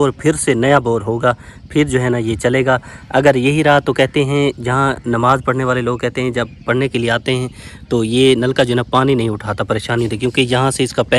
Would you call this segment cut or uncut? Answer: uncut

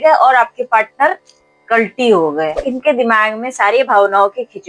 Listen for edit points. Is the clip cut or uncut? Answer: cut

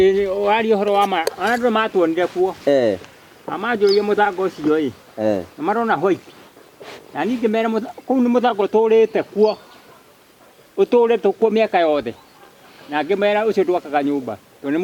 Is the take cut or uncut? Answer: uncut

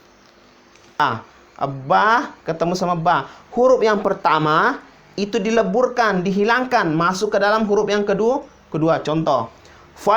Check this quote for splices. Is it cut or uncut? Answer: cut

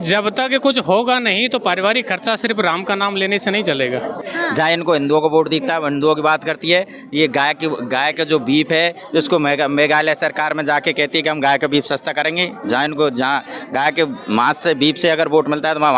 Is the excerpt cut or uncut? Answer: cut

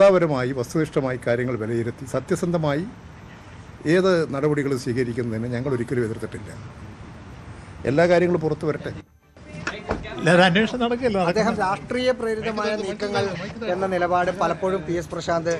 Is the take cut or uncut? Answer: cut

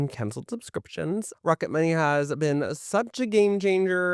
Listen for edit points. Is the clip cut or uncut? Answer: cut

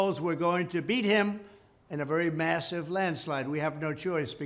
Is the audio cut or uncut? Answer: cut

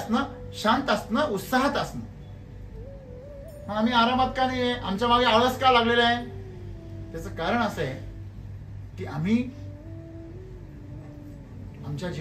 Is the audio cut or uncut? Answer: uncut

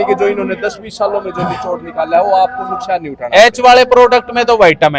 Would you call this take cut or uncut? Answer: uncut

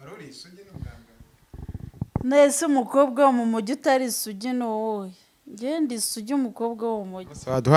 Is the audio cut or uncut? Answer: uncut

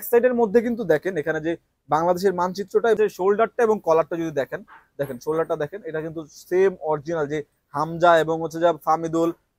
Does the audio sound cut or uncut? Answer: cut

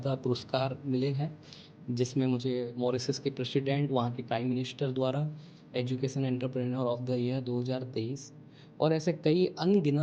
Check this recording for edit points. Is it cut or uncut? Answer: uncut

